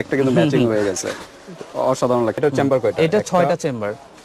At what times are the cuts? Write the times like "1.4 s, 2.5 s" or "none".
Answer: 2.4 s